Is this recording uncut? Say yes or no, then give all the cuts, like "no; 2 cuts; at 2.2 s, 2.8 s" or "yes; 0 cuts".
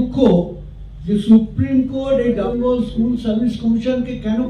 no; 1 cut; at 2.5 s